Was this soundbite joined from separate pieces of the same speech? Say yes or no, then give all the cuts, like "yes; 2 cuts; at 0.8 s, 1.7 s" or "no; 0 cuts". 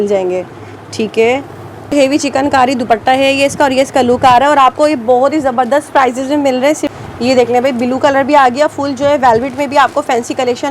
yes; 2 cuts; at 1.9 s, 6.9 s